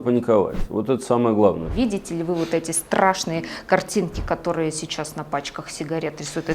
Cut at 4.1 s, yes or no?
no